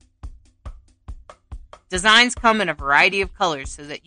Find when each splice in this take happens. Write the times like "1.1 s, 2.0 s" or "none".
1.4 s